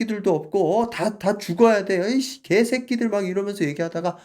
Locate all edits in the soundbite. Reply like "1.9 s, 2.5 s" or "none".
none